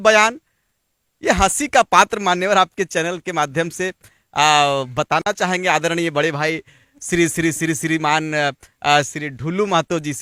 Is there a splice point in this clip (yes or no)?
no